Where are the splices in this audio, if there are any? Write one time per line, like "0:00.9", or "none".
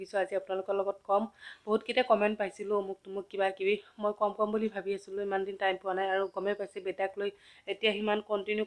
none